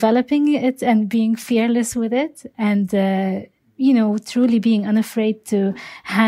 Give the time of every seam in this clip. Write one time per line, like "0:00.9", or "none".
none